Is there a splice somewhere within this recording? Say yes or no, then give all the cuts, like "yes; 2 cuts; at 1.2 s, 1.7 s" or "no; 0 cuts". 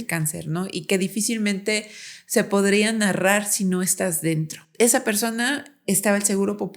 yes; 1 cut; at 4.6 s